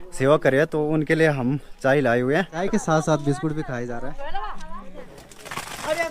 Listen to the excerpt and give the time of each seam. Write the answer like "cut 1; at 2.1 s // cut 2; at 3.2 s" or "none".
cut 1; at 2.6 s // cut 2; at 5.1 s